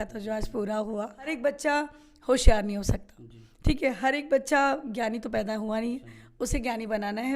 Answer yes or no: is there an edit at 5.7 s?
no